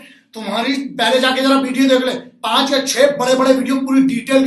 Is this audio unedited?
yes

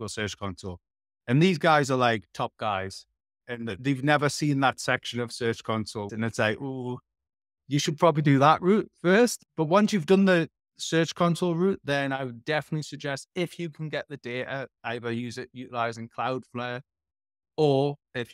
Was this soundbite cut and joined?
yes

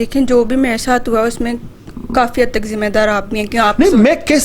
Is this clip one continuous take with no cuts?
yes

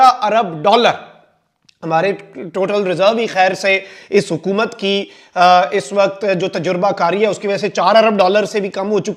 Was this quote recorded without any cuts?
yes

